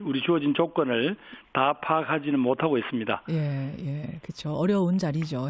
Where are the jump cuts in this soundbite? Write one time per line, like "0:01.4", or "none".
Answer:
0:02.4